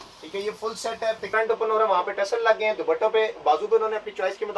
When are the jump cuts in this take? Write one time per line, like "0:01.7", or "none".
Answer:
0:01.3